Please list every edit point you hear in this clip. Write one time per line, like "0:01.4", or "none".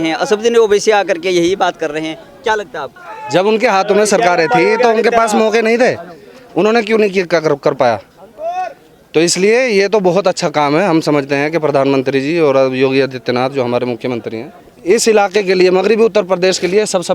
none